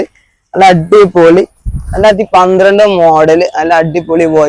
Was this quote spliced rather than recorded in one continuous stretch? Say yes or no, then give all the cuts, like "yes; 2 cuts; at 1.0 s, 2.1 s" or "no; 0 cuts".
no; 0 cuts